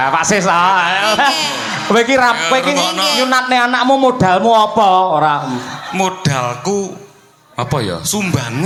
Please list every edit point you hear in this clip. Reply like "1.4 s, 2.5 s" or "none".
none